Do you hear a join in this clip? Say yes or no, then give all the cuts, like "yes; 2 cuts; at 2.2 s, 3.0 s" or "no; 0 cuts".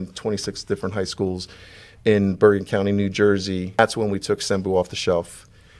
yes; 1 cut; at 3.8 s